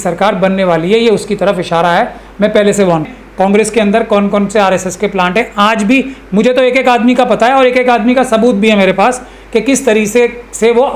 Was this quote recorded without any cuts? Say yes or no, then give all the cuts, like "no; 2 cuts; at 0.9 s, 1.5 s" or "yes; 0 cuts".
no; 1 cut; at 3.2 s